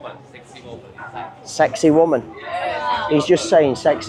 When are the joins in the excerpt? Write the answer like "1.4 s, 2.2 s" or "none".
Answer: none